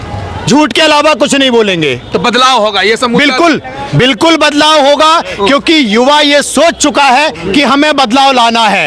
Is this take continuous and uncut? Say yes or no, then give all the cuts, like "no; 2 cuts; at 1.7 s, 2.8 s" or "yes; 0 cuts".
yes; 0 cuts